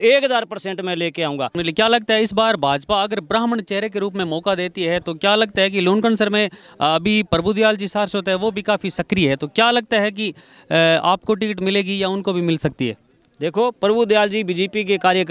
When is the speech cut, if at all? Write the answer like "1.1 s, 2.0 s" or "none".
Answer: 1.6 s